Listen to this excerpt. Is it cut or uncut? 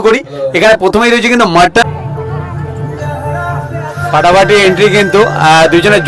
cut